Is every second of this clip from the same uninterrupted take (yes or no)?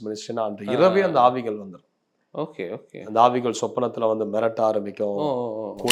yes